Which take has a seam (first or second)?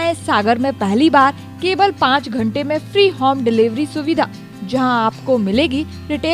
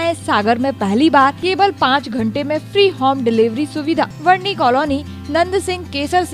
second